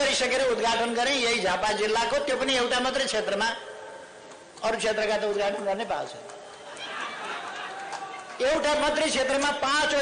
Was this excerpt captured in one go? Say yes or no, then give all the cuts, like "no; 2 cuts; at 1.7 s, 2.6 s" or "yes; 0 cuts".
yes; 0 cuts